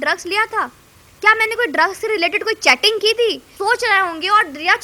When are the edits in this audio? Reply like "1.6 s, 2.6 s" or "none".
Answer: 3.5 s